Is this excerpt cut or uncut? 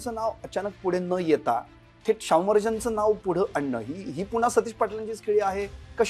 uncut